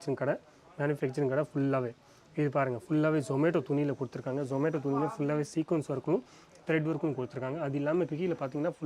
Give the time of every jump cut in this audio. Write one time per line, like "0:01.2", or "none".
none